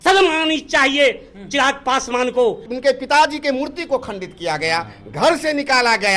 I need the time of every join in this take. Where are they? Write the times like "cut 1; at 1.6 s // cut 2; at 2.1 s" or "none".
cut 1; at 2.7 s